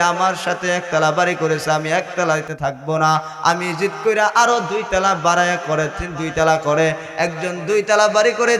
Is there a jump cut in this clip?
no; 0 cuts

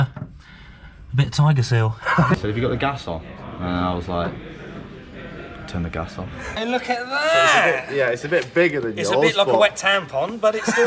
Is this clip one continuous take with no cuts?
no; 2 cuts; at 2.4 s, 6.6 s

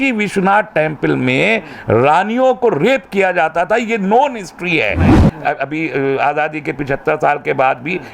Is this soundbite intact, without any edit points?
no; 1 cut; at 5.1 s

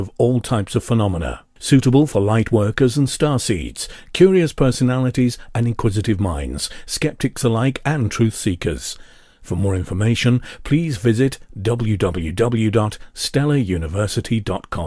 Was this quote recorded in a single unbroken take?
yes; 0 cuts

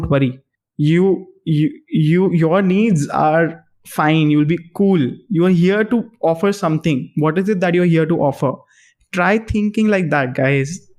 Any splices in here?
no; 0 cuts

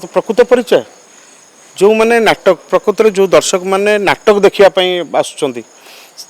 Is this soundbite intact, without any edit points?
yes; 0 cuts

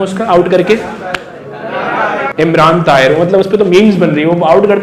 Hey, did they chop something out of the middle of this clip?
yes; 1 cut; at 2.3 s

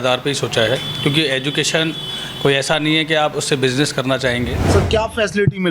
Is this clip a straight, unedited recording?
no; 1 cut; at 4.6 s

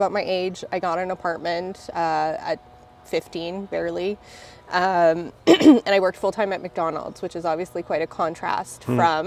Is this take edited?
no; 0 cuts

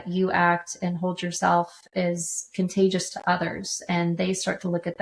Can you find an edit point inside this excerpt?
no; 0 cuts

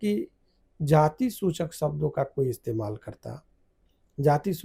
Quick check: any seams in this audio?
no; 0 cuts

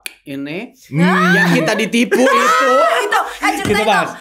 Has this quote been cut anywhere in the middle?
no; 0 cuts

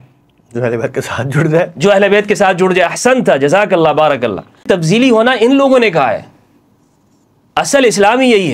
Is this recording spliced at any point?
yes; 1 cut; at 4.6 s

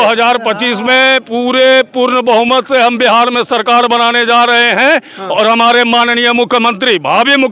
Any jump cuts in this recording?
no; 0 cuts

